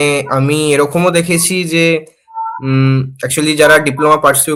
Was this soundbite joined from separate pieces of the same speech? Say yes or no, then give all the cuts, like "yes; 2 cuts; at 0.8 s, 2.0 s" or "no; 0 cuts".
no; 0 cuts